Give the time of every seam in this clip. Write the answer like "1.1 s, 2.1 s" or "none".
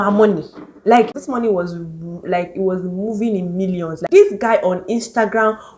1.2 s, 4.0 s